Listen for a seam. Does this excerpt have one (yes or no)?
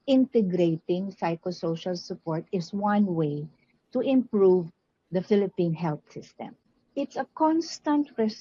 yes